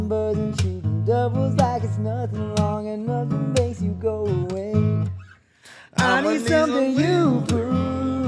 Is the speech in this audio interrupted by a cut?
no; 0 cuts

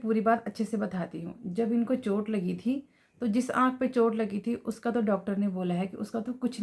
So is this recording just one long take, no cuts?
yes; 0 cuts

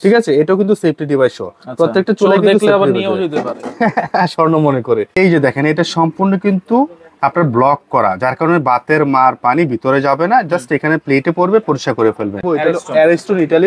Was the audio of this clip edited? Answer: yes; 2 cuts; at 5.1 s, 12.4 s

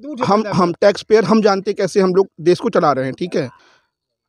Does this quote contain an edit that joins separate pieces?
no; 0 cuts

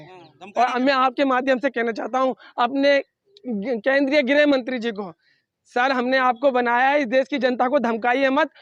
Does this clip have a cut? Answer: no; 0 cuts

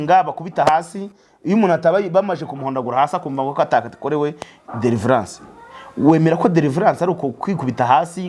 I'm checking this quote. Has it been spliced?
no; 0 cuts

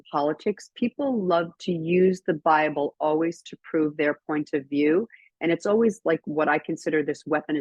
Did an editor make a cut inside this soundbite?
no; 0 cuts

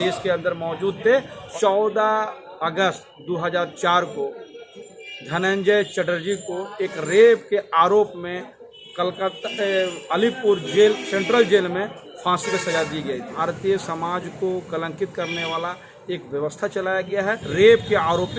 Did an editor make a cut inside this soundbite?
yes; 3 cuts; at 1.4 s, 13.3 s, 17.4 s

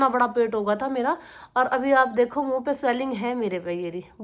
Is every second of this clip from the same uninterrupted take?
yes; 0 cuts

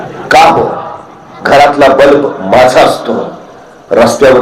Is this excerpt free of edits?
yes; 0 cuts

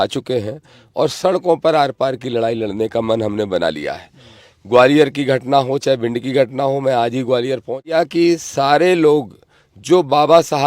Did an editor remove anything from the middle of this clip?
yes; 1 cut; at 7.9 s

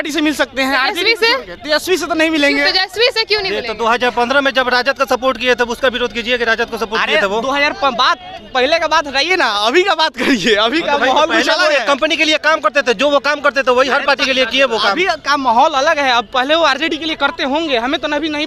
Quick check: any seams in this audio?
no; 0 cuts

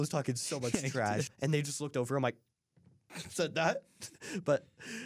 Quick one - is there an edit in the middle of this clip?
yes; 1 cut; at 1.2 s

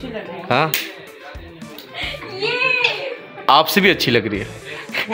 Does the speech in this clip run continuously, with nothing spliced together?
yes; 0 cuts

